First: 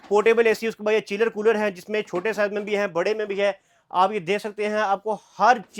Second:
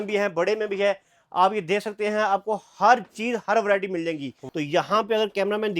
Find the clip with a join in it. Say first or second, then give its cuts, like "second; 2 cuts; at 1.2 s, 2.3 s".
second; 1 cut; at 4.3 s